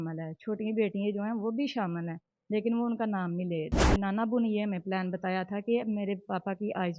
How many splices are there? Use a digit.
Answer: 1